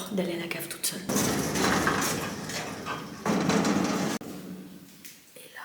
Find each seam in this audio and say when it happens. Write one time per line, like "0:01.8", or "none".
0:01.1
0:04.2